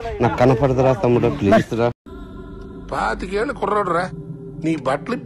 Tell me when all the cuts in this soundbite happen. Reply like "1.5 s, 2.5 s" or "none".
2.1 s